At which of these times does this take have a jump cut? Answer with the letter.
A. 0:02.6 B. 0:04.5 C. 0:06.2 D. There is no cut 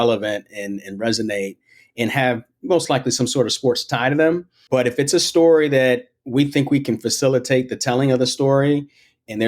B